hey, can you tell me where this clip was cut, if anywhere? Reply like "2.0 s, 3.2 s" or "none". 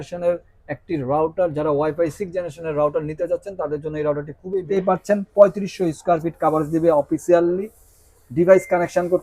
4.7 s